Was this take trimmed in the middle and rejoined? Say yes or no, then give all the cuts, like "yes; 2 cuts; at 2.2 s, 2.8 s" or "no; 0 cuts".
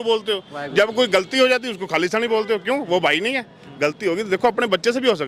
no; 0 cuts